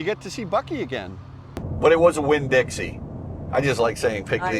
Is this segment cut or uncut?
cut